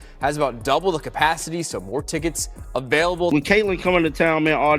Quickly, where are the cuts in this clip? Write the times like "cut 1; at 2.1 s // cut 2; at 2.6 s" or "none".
cut 1; at 3.3 s